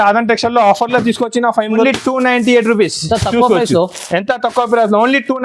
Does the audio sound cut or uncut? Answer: cut